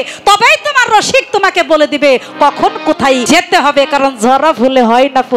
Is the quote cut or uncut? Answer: cut